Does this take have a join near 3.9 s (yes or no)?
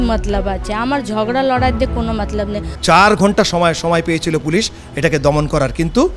no